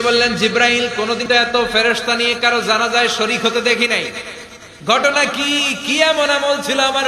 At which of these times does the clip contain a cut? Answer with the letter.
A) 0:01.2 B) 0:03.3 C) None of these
A